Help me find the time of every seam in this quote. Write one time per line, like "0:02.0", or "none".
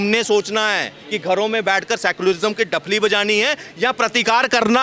none